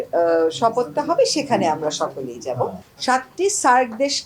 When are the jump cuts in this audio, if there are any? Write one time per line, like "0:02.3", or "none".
0:02.9